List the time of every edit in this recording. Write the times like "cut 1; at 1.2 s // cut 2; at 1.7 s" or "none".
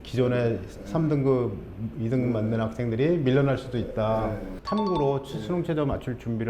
cut 1; at 4.5 s

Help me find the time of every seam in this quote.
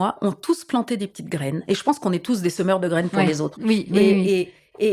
none

